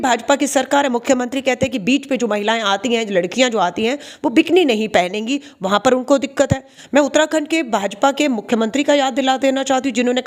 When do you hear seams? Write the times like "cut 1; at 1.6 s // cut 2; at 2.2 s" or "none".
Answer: cut 1; at 6.8 s